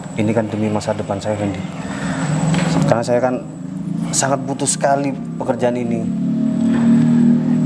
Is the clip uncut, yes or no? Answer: yes